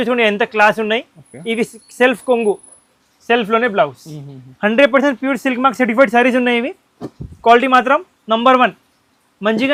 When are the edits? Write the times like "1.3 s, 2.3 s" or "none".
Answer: none